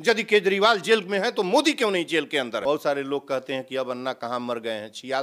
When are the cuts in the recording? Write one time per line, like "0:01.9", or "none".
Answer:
0:02.6